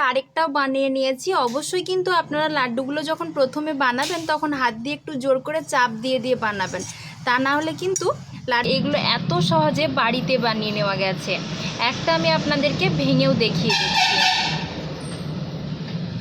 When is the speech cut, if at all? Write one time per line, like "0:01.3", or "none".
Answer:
0:08.7